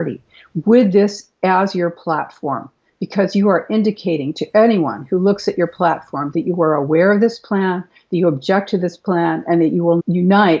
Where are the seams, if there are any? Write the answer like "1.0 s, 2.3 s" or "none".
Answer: none